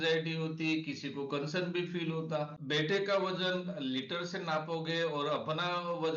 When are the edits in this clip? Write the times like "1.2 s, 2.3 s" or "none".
2.6 s